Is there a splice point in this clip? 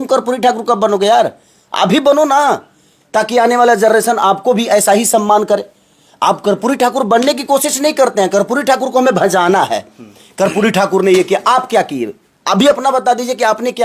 no; 0 cuts

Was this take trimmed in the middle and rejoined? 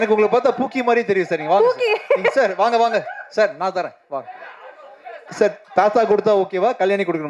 yes; 1 cut; at 5.2 s

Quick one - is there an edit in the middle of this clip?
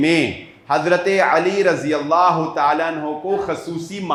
no; 0 cuts

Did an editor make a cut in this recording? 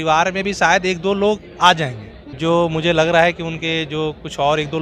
no; 0 cuts

